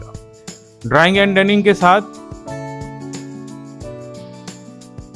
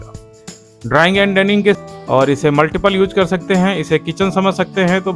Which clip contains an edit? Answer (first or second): second